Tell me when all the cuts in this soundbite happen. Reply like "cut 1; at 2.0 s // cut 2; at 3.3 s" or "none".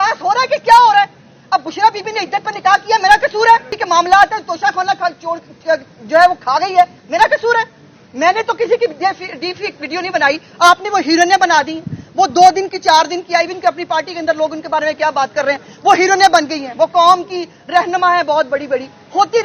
none